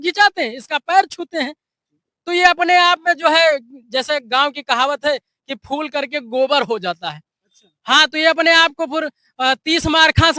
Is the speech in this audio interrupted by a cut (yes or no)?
no